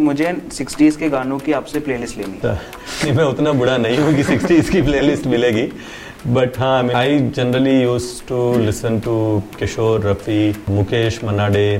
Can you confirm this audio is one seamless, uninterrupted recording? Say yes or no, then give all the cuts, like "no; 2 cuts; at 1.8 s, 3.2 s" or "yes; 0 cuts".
no; 3 cuts; at 2.4 s, 6.9 s, 10.6 s